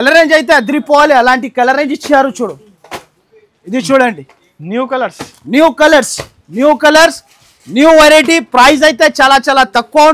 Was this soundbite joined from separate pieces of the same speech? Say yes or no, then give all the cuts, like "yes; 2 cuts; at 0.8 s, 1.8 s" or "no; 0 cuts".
no; 0 cuts